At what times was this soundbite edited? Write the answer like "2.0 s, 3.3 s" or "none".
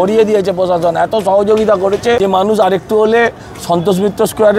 2.2 s